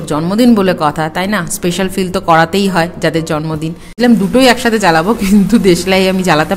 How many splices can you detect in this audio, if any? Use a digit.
1